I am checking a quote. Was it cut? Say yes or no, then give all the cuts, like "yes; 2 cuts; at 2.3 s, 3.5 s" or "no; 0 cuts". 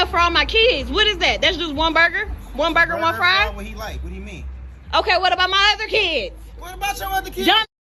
no; 0 cuts